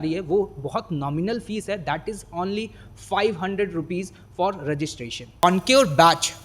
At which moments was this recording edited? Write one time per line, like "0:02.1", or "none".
0:05.4